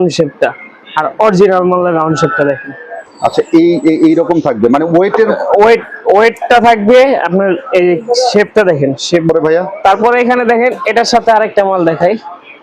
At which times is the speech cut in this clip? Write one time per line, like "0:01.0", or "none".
0:09.2